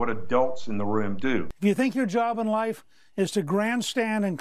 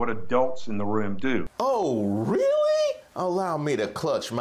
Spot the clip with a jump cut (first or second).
first